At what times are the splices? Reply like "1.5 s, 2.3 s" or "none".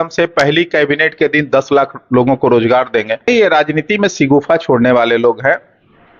3.3 s